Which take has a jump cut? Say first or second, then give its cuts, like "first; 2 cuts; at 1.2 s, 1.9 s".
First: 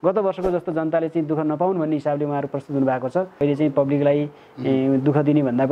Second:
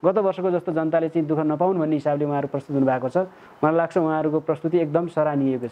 first; 1 cut; at 3.4 s